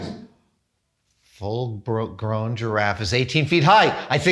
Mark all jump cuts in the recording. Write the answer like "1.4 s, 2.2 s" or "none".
none